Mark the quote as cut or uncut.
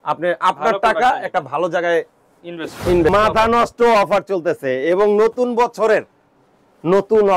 cut